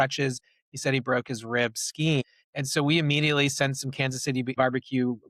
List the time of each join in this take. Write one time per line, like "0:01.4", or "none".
0:02.2
0:04.6